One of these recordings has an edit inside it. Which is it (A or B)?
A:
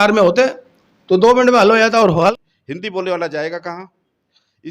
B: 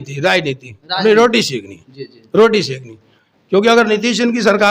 A